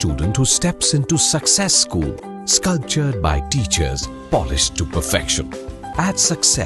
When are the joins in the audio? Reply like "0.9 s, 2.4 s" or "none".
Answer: none

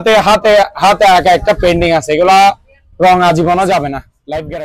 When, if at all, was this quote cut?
none

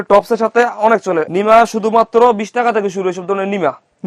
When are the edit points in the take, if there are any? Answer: 1.3 s

